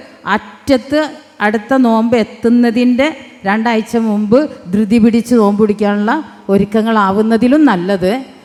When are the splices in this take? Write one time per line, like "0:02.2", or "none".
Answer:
none